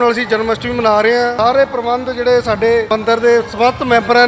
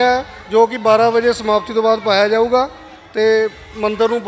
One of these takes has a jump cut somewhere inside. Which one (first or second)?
first